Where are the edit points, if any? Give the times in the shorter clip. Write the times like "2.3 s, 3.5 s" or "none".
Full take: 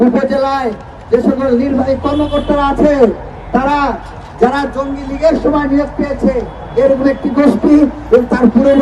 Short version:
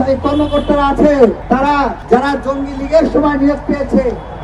1.7 s